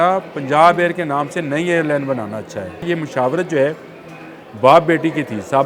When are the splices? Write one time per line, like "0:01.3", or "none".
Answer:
0:02.9